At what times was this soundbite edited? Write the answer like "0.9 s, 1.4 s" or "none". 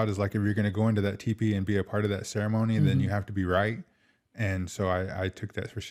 none

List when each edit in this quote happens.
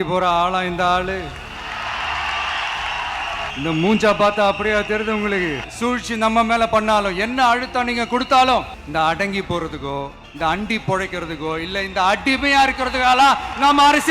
3.5 s, 5.7 s, 8.8 s, 10.2 s

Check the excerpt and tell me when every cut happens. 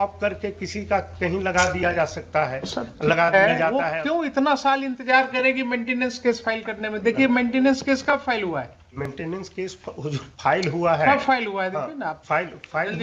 3.8 s

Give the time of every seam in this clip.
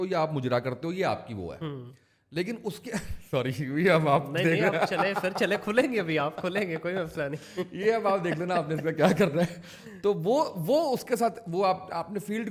none

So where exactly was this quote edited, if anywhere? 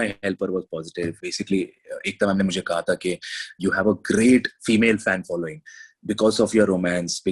1.3 s

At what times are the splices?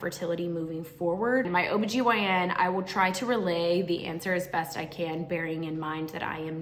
none

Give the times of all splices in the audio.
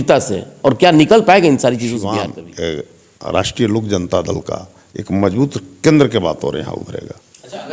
2.1 s

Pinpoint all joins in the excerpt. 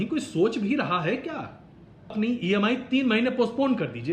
2.1 s

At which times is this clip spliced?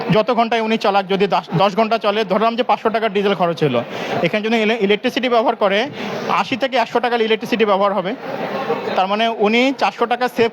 none

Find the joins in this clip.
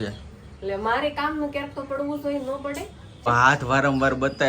3.3 s

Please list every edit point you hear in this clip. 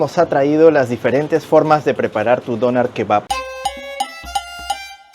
3.2 s

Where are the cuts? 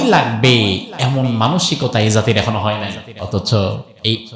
3.1 s

